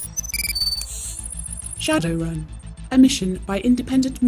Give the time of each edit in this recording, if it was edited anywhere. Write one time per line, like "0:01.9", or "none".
0:01.7